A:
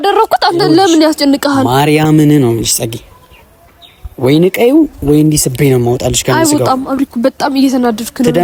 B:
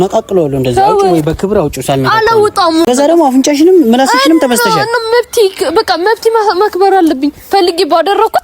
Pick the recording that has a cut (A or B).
B